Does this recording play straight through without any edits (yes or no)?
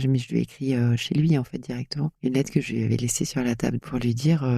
no